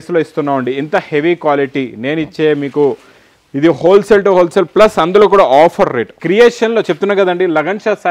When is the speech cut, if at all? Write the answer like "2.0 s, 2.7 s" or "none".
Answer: 6.1 s

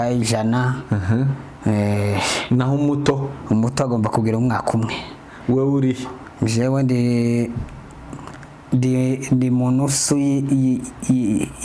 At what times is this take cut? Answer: none

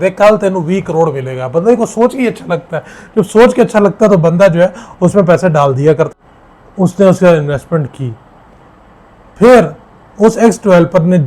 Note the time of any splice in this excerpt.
6.1 s

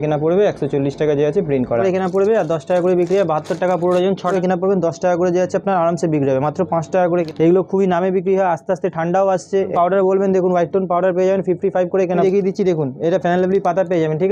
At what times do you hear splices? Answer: 1.8 s, 4.3 s, 7.3 s, 9.7 s, 12.2 s

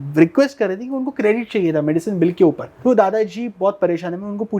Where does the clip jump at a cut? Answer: 2.7 s

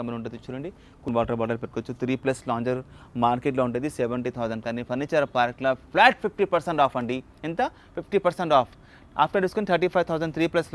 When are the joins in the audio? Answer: 1.1 s

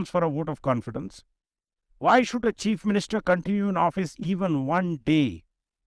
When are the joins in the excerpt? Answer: none

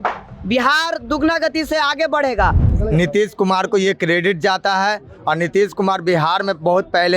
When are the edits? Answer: 2.6 s

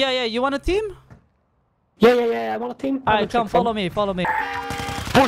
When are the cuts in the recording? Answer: 4.3 s

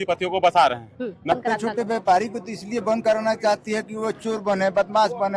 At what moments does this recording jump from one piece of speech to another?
1.3 s

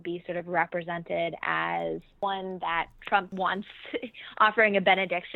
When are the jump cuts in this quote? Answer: 2.1 s, 3.3 s

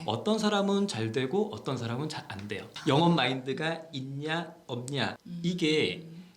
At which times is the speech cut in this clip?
2.7 s, 5.2 s

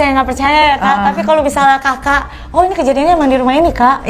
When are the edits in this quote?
none

